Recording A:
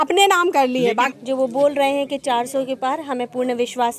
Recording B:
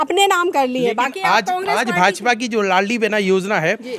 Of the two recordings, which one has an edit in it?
A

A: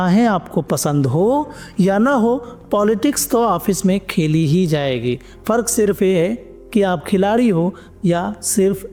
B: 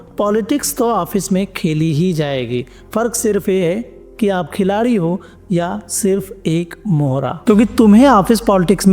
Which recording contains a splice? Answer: B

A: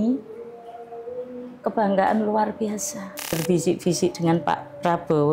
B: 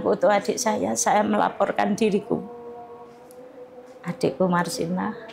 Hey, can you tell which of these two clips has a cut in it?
A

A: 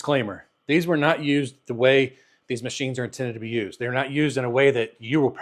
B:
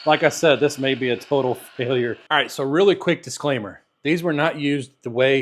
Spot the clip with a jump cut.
B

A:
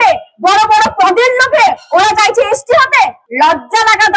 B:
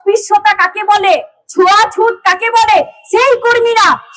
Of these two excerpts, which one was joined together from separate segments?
A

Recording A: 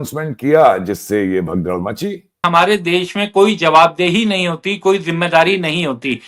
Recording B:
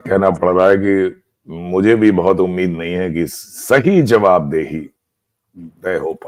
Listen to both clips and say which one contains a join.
A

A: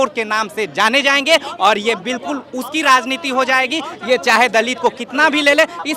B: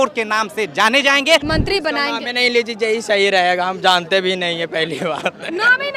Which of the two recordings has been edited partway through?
B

